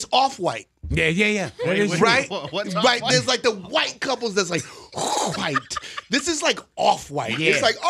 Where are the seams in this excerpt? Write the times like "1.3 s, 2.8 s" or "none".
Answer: none